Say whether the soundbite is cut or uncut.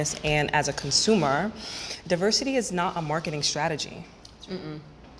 uncut